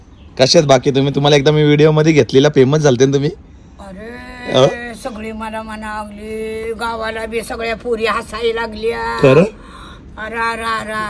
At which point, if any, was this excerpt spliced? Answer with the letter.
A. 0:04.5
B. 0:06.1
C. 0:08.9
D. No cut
D